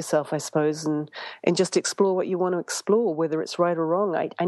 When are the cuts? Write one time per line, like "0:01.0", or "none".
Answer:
none